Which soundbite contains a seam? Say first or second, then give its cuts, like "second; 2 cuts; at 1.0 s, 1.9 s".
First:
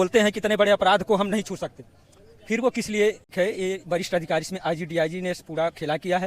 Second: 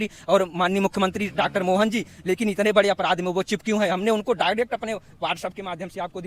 first; 1 cut; at 3.2 s